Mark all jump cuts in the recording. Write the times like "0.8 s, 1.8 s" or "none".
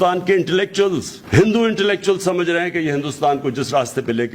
none